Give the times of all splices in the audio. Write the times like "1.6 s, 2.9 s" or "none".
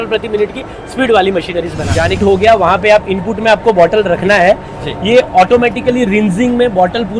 2.2 s